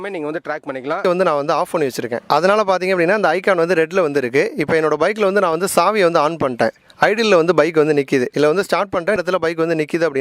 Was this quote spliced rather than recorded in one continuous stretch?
yes; 1 cut; at 1.0 s

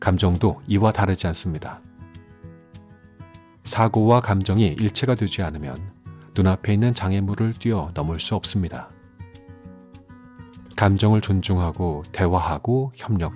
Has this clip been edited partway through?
no; 0 cuts

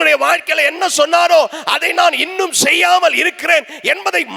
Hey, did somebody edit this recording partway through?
no; 0 cuts

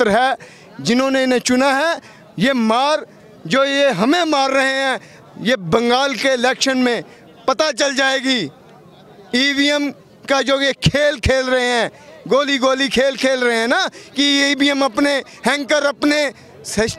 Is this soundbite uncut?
yes; 0 cuts

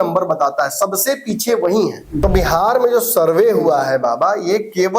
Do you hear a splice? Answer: yes; 1 cut; at 2.2 s

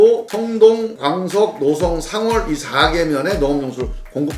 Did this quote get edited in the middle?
no; 0 cuts

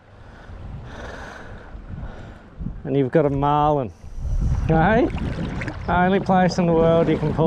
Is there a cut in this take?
no; 0 cuts

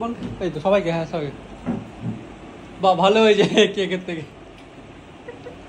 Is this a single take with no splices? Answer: yes; 0 cuts

